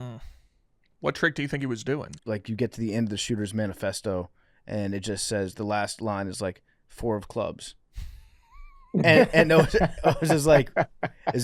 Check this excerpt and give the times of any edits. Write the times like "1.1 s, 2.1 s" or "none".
2.1 s

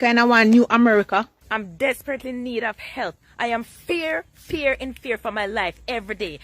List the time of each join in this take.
0.9 s

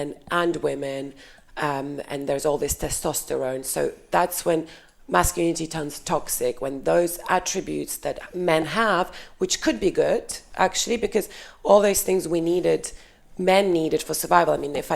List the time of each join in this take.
none

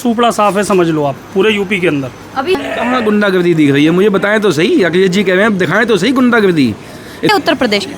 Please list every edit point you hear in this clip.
2.6 s, 7.3 s

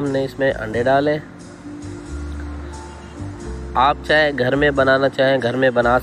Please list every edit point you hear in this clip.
1.6 s, 3.7 s

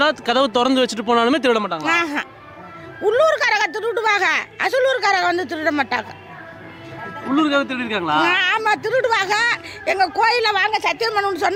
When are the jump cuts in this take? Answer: none

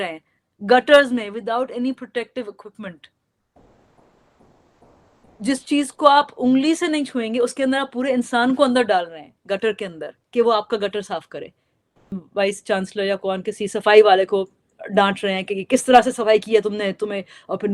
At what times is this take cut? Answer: 12.1 s

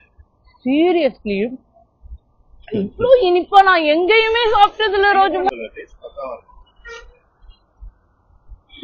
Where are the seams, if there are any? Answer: 5.6 s

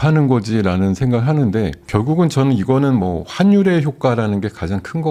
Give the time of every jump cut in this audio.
none

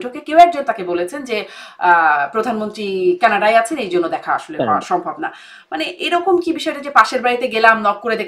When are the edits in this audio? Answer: none

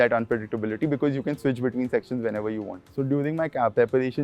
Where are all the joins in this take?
2.8 s

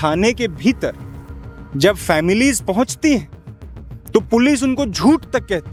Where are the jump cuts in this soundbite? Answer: none

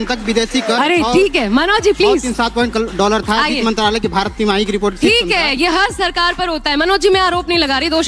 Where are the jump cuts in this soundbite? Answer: none

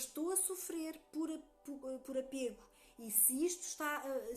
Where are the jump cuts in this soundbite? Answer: none

